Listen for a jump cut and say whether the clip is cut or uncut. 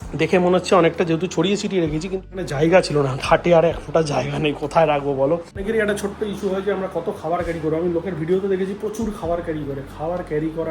cut